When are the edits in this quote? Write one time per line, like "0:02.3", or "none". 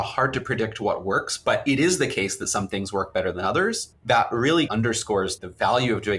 0:03.9
0:04.9